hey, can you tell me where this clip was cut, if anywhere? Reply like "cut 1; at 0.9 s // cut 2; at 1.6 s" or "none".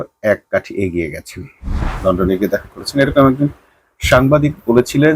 cut 1; at 1.8 s